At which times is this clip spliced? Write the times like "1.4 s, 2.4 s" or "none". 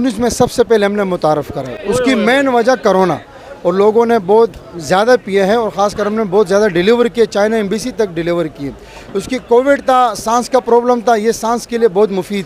none